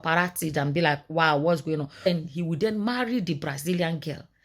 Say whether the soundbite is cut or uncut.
cut